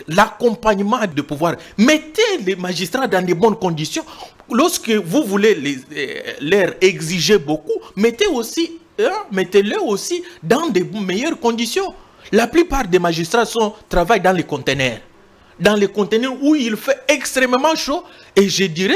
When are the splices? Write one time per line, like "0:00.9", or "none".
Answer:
0:01.1